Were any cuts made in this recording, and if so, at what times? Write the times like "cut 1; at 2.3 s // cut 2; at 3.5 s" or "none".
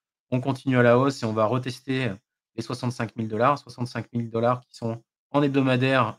cut 1; at 5.1 s